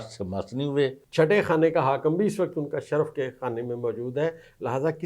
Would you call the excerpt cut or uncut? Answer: cut